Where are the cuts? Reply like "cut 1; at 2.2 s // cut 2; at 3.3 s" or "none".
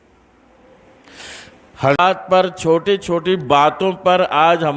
cut 1; at 2.0 s